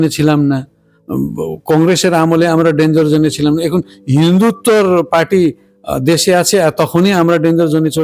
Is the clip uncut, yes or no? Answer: yes